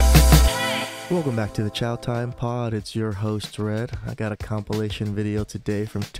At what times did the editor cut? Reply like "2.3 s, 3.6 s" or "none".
1.0 s